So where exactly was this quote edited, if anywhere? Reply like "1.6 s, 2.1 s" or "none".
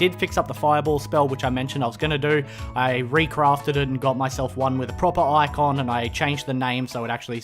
2.5 s